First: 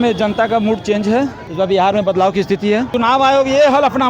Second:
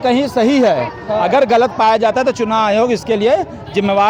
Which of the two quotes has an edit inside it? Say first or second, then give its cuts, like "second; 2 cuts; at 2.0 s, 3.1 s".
first; 2 cuts; at 1.4 s, 2.9 s